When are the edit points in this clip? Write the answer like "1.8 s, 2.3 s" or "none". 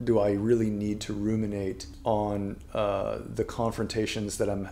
1.9 s